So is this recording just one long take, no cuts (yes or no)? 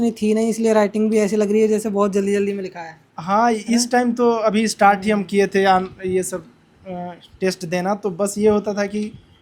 yes